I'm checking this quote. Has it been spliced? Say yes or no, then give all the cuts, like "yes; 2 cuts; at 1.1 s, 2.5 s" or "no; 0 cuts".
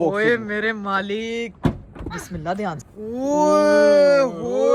yes; 1 cut; at 2.8 s